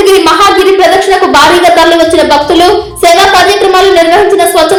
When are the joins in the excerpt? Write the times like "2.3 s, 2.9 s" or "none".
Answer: none